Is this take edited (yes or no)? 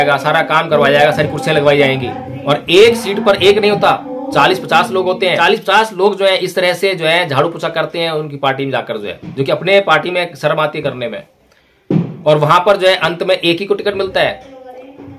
yes